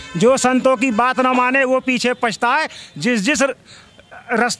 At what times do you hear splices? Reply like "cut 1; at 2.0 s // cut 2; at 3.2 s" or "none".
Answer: none